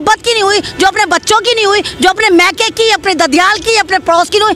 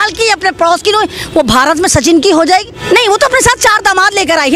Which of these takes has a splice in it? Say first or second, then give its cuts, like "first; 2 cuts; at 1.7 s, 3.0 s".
second; 1 cut; at 2.6 s